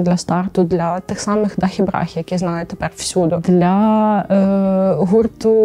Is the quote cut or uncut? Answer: uncut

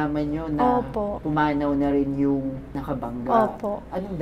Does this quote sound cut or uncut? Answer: cut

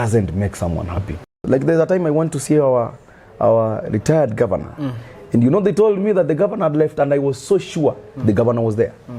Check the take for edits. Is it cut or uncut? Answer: cut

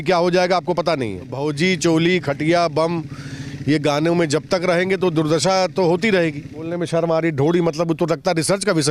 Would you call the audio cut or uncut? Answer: cut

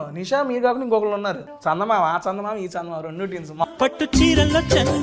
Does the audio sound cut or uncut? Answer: cut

